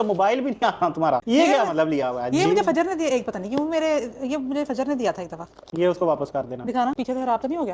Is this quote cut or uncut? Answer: uncut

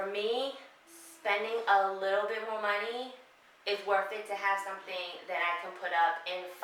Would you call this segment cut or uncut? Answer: uncut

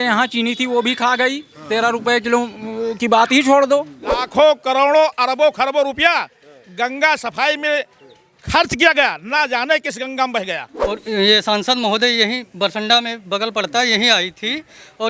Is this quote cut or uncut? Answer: cut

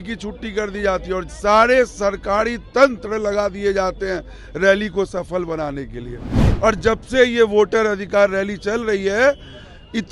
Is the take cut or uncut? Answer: uncut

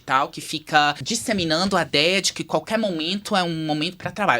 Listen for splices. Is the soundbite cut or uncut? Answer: cut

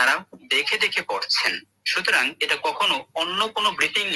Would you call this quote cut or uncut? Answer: uncut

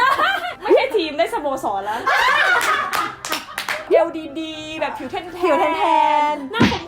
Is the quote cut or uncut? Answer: cut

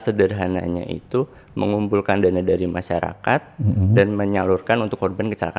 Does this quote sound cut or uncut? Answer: uncut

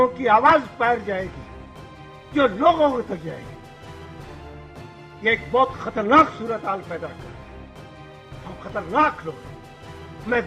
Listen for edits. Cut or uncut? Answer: uncut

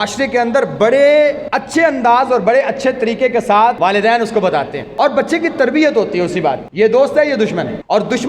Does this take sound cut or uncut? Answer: cut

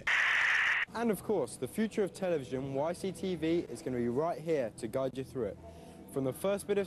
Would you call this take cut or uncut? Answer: cut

